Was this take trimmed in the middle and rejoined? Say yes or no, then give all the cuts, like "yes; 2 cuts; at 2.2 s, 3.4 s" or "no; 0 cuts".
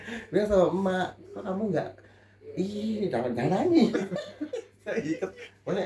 no; 0 cuts